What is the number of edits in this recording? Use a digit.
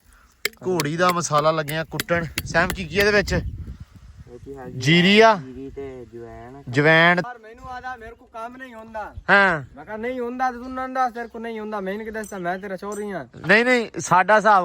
1